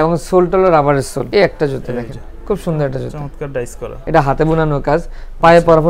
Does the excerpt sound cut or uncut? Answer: cut